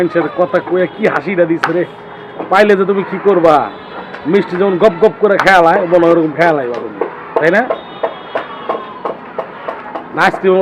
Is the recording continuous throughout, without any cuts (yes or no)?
yes